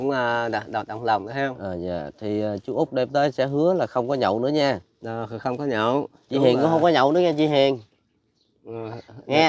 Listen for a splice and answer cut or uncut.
uncut